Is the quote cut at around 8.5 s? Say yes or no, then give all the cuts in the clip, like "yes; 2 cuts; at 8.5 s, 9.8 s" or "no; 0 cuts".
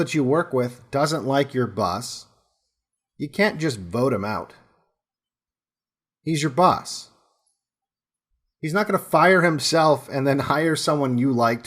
yes; 1 cut; at 8.5 s